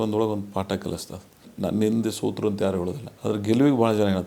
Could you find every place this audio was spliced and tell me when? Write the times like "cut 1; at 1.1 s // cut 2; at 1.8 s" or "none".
cut 1; at 1.5 s // cut 2; at 3.0 s